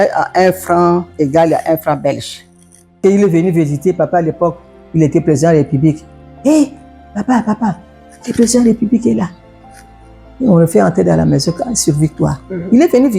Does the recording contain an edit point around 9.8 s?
no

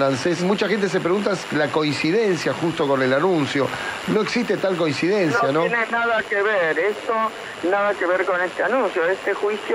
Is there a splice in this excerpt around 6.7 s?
no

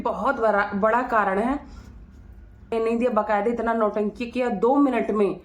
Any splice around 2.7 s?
yes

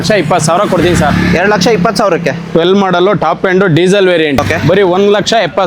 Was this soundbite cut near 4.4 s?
yes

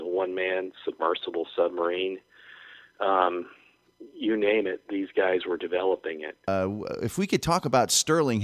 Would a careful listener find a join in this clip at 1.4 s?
no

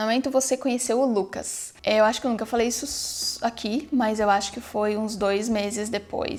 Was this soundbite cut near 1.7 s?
no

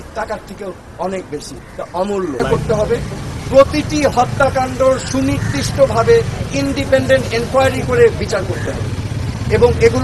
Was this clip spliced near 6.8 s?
no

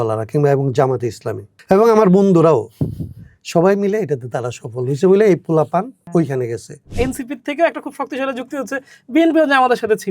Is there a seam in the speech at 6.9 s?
yes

